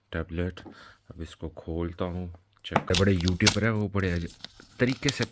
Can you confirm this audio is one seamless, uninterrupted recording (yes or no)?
no